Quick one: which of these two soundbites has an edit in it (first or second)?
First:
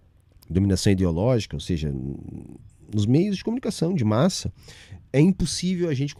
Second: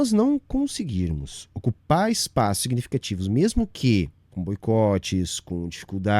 second